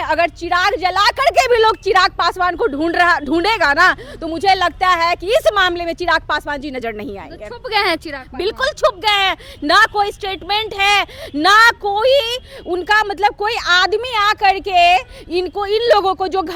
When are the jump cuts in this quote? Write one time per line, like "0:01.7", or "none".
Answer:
none